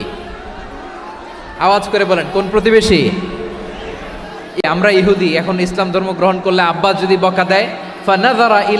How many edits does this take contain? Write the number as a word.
one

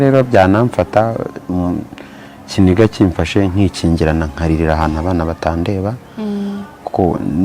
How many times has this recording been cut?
zero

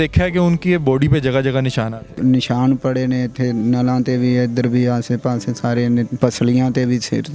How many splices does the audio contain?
two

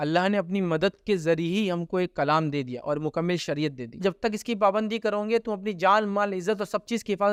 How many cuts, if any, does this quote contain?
zero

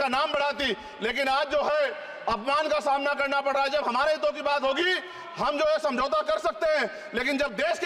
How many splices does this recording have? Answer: zero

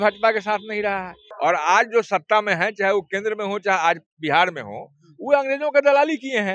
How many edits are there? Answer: one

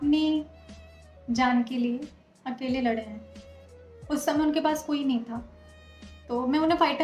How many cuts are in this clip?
zero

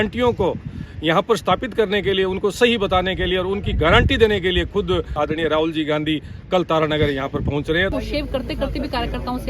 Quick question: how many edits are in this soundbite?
two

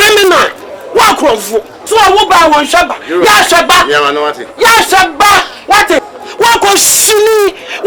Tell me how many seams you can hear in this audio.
zero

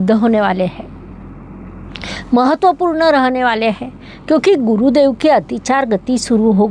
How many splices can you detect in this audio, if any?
zero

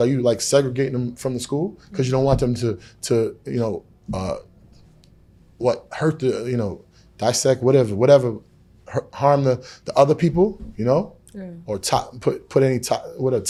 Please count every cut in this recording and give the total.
zero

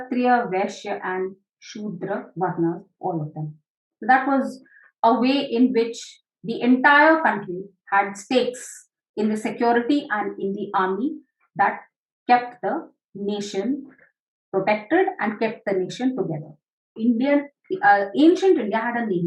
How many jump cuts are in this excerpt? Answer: one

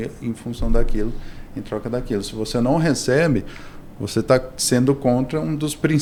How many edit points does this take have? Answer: zero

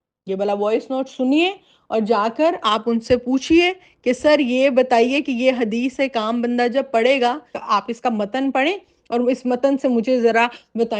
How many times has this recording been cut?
one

